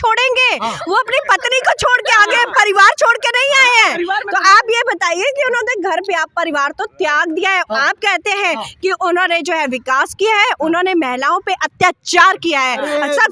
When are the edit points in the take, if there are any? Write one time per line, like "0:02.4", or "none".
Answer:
none